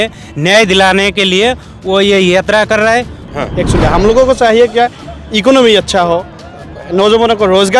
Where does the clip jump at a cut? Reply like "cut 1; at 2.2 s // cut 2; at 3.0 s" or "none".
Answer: cut 1; at 3.2 s